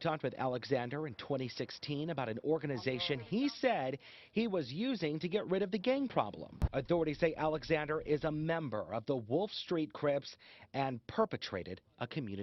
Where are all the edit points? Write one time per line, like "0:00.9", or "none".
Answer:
0:06.5